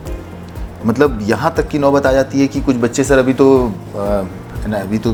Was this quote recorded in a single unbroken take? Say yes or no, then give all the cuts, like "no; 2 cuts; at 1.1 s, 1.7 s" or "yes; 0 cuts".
yes; 0 cuts